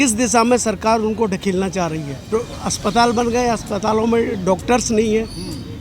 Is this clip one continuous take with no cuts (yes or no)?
no